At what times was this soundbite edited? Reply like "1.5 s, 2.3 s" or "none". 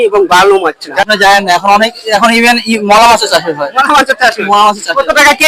1.1 s